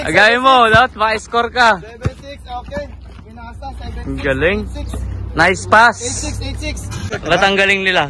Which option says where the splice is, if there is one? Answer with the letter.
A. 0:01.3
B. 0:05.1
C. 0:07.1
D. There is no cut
C